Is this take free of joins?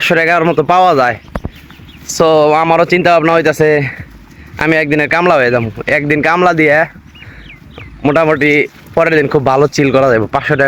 yes; 0 cuts

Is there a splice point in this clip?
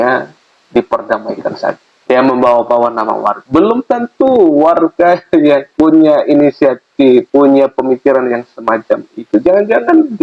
yes; 4 cuts; at 1.9 s, 3.4 s, 5.7 s, 7.3 s

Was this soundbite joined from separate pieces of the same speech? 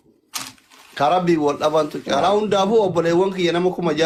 no; 0 cuts

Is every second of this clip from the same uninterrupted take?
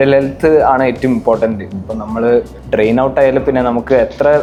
yes; 0 cuts

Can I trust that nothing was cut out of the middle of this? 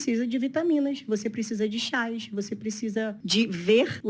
yes; 0 cuts

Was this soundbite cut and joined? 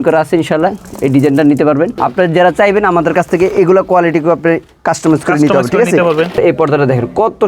yes; 2 cuts; at 2.0 s, 6.4 s

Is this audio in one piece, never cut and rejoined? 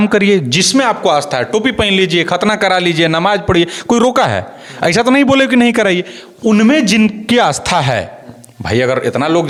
yes; 0 cuts

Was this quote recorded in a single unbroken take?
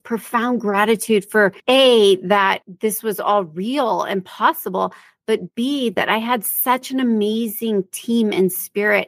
no; 2 cuts; at 1.6 s, 2.7 s

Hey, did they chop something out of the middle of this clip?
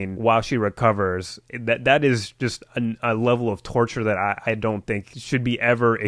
no; 0 cuts

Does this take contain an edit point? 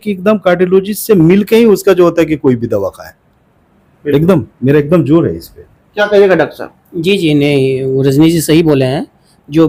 no; 0 cuts

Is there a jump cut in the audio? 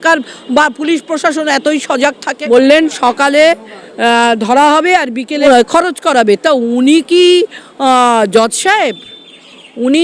yes; 2 cuts; at 2.3 s, 5.4 s

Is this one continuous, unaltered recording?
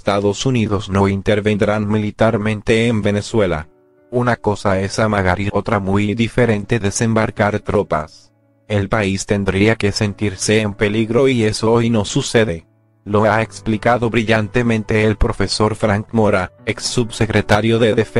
yes; 0 cuts

